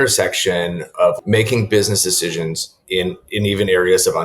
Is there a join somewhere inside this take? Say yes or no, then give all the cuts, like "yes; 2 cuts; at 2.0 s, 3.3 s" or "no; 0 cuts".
yes; 1 cut; at 1.2 s